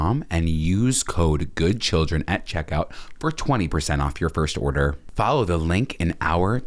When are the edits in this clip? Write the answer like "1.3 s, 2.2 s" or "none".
5.0 s

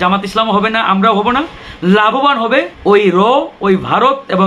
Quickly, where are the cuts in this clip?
2.7 s

